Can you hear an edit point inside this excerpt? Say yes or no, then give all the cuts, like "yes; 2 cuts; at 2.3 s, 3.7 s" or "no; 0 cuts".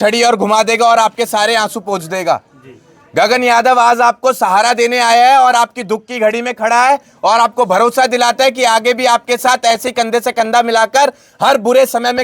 no; 0 cuts